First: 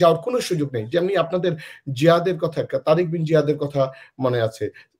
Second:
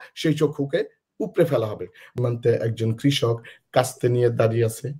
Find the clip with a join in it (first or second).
second